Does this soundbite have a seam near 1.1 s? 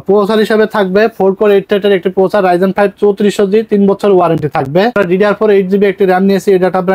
no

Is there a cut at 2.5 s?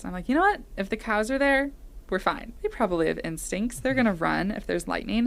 yes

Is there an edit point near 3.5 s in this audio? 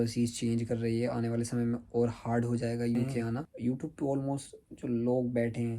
yes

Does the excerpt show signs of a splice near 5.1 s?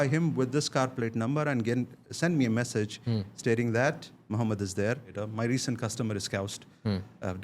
yes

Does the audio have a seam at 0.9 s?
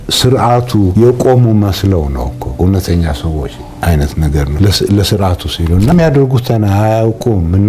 yes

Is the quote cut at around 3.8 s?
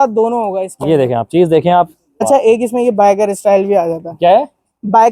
no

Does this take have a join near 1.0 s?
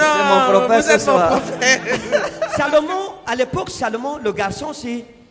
no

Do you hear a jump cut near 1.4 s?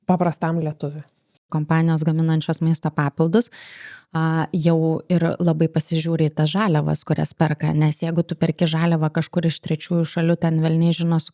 yes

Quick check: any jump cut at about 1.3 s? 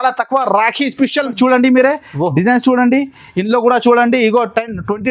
yes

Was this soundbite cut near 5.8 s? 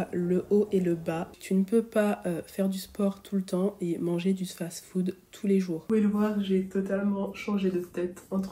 yes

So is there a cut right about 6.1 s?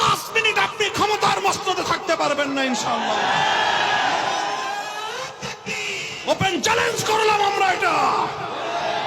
yes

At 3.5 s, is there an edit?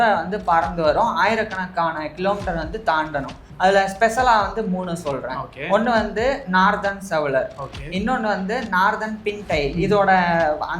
yes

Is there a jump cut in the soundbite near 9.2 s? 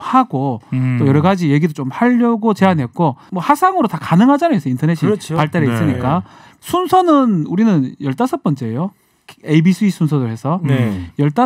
no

